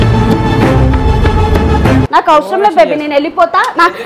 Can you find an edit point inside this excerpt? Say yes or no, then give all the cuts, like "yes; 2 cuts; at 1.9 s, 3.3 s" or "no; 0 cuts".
yes; 1 cut; at 2.1 s